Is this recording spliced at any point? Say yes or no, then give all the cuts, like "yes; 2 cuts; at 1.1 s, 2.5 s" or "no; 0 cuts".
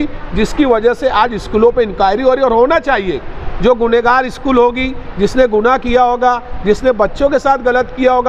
no; 0 cuts